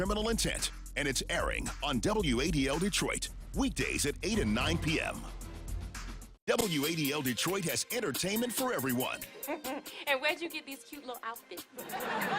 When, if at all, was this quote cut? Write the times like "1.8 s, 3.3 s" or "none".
6.2 s